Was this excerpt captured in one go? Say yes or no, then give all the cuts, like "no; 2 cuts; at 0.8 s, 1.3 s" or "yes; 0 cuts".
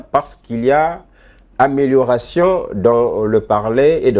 yes; 0 cuts